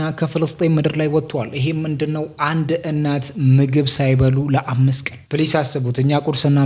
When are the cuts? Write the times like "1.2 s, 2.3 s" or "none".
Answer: none